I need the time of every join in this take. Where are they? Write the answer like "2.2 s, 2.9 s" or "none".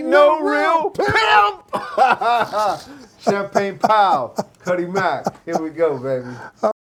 none